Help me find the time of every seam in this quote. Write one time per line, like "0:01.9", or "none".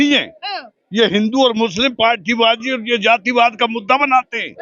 none